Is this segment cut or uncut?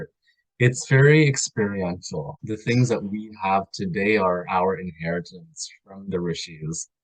cut